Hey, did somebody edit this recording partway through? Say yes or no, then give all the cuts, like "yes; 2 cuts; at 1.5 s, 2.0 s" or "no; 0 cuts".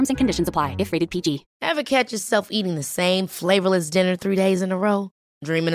yes; 1 cut; at 1.5 s